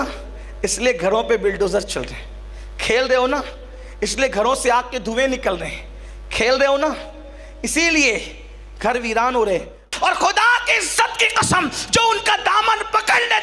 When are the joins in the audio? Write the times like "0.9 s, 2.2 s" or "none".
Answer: 9.9 s